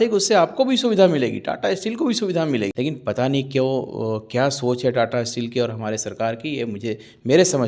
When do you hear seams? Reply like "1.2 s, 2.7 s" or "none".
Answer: 2.7 s